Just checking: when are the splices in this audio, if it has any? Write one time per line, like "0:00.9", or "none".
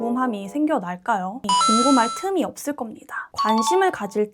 0:01.4